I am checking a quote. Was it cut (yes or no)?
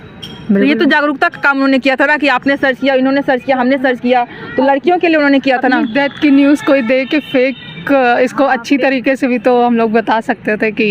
no